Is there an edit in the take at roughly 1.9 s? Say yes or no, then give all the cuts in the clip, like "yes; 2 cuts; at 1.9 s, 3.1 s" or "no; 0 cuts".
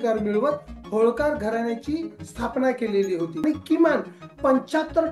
no; 1 cut; at 3.4 s